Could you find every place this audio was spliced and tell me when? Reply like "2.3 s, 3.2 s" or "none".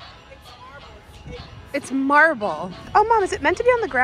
2.7 s